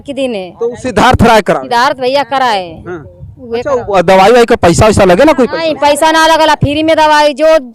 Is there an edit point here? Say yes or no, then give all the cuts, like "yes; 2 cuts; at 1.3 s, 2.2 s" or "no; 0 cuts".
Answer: no; 0 cuts